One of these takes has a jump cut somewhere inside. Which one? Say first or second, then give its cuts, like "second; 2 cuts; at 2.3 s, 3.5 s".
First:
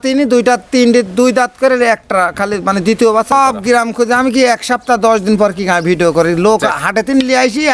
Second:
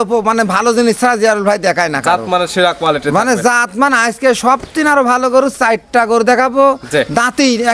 first; 1 cut; at 3.3 s